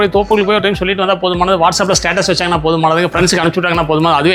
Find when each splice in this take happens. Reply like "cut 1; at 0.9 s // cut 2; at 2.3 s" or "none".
none